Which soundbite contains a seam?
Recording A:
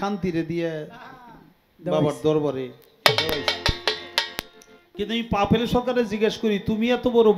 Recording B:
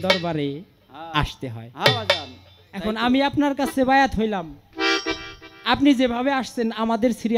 A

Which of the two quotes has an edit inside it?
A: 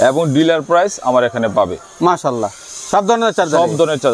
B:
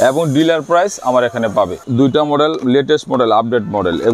B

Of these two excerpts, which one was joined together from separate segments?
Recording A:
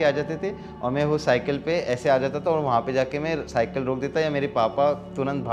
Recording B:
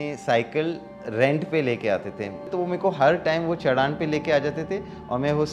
B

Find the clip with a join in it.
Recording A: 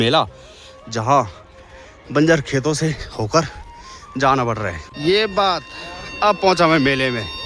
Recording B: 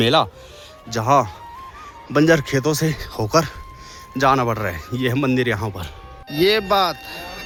A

